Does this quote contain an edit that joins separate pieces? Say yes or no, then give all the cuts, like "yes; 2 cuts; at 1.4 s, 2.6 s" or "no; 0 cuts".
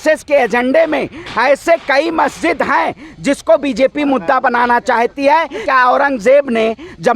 yes; 1 cut; at 5.6 s